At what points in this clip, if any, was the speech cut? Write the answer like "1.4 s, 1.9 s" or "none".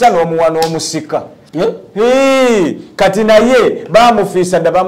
1.4 s